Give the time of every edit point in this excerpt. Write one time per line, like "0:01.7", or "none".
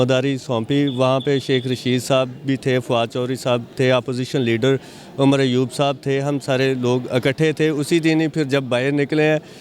none